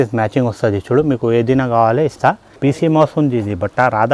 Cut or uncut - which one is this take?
cut